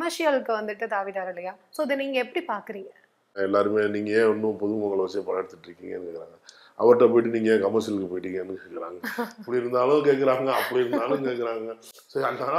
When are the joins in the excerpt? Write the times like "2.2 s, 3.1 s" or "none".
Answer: 3.4 s